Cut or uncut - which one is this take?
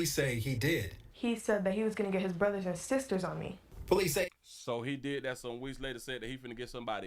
uncut